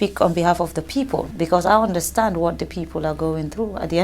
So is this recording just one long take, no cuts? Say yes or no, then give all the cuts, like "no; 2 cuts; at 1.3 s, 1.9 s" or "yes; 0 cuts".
no; 1 cut; at 1.3 s